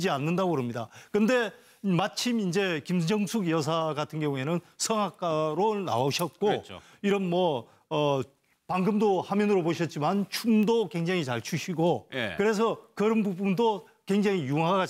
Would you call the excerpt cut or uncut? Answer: cut